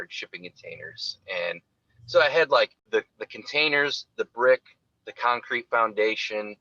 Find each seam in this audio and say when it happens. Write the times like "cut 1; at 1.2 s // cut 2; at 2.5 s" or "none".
cut 1; at 2.8 s

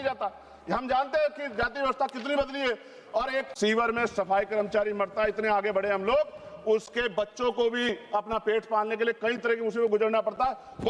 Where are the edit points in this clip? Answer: cut 1; at 3.5 s

